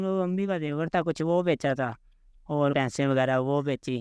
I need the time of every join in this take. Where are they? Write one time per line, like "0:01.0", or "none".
0:02.7